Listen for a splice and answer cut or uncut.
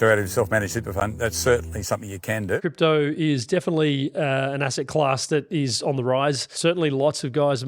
cut